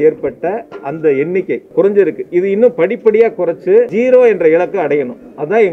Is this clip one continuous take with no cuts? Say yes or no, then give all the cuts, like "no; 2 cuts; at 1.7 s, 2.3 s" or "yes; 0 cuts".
no; 2 cuts; at 1.6 s, 3.9 s